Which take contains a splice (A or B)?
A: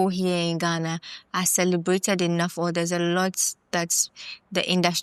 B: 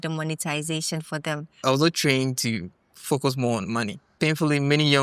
B